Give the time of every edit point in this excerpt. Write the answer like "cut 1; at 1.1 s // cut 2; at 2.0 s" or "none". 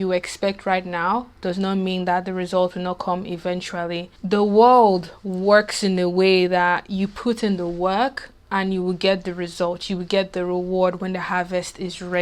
cut 1; at 4.1 s

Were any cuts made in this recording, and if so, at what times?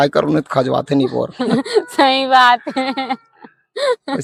none

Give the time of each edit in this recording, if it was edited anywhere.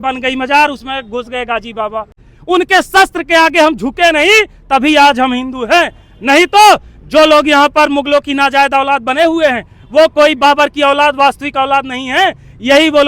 cut 1; at 2.2 s

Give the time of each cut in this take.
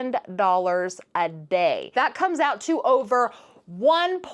cut 1; at 1.9 s

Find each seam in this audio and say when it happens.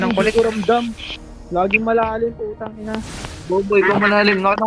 none

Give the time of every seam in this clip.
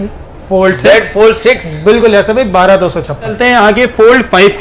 cut 1; at 3.4 s

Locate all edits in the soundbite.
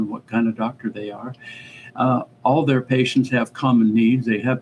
none

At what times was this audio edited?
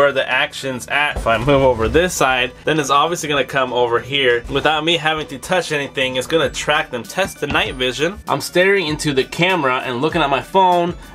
cut 1; at 1.2 s // cut 2; at 2.5 s // cut 3; at 4.4 s // cut 4; at 7.0 s // cut 5; at 8.2 s

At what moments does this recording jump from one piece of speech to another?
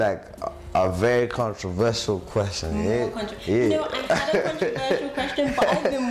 none

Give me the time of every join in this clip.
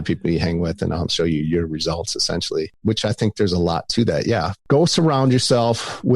cut 1; at 1.1 s

